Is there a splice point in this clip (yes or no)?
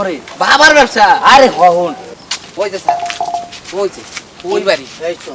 yes